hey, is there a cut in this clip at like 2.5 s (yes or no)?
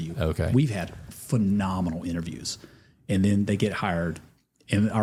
no